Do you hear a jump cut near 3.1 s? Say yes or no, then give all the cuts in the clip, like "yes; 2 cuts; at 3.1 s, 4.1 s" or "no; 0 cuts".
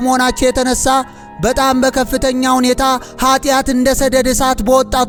no; 0 cuts